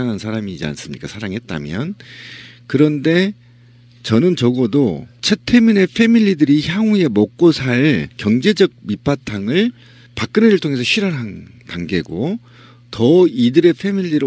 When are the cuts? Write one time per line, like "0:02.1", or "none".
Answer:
none